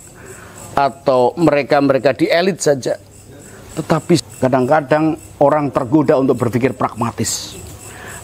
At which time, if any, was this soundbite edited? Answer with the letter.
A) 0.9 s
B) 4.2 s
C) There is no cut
B